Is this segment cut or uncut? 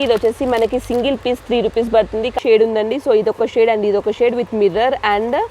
cut